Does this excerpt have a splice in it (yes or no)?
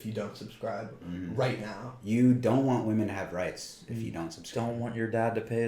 no